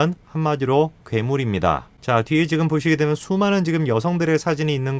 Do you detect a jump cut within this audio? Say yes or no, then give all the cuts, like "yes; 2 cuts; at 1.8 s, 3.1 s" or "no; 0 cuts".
no; 0 cuts